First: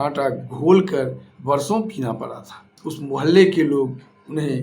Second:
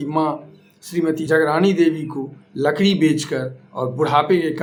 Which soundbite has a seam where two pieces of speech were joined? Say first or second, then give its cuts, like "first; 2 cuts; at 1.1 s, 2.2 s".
first; 1 cut; at 2.8 s